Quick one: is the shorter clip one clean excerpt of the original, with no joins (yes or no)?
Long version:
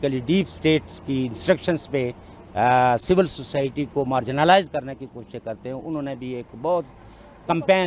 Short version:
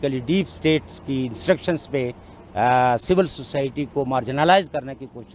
yes